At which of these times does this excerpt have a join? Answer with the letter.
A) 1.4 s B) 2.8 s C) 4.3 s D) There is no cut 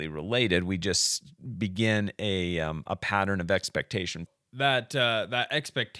C